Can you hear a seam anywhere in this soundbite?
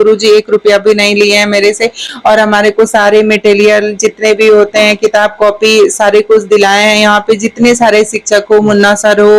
no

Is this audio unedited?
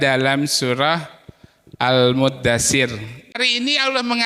no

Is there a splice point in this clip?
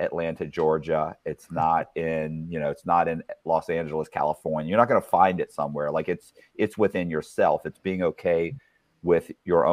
no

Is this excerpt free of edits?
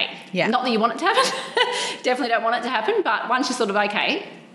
yes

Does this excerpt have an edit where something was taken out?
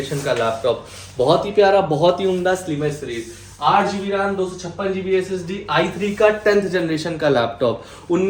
no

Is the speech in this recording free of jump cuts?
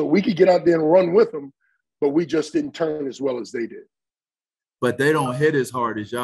no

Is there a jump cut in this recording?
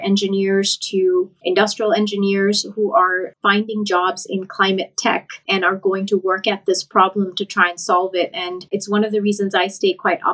yes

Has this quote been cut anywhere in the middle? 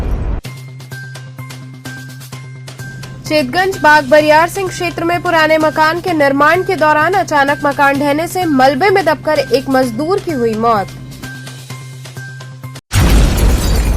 no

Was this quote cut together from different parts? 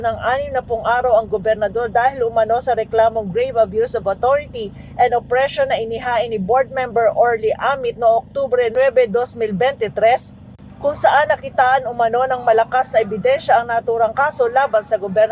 no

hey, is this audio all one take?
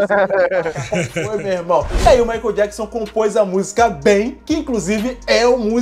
no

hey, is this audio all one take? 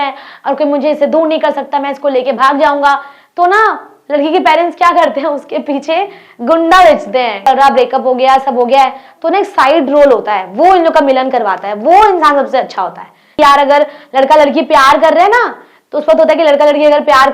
no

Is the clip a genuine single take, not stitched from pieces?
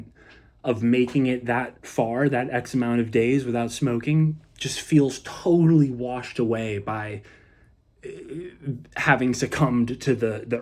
yes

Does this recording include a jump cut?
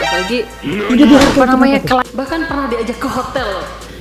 yes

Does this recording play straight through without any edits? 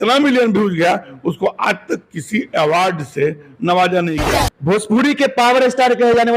no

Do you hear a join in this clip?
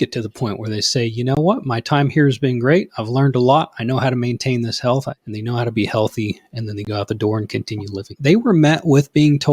yes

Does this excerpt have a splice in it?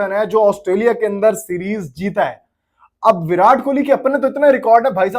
no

